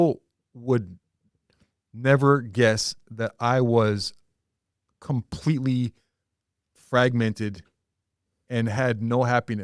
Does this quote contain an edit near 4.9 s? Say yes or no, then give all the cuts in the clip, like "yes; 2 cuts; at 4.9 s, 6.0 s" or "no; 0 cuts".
no; 0 cuts